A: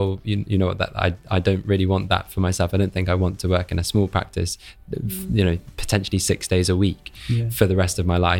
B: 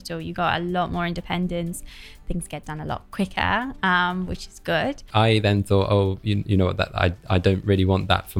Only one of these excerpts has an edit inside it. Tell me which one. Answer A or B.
B